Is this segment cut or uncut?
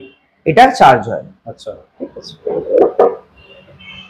uncut